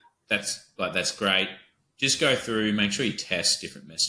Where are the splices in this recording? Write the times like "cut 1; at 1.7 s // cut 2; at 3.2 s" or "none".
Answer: none